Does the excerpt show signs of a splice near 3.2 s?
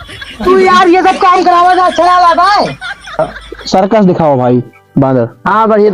yes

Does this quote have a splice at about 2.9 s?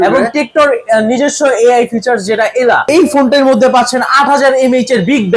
yes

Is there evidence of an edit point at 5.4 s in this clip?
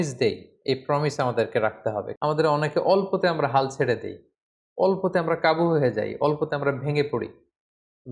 no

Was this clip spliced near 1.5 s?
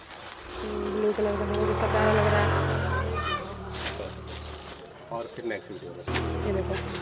no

